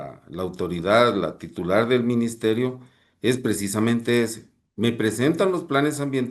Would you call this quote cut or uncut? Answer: uncut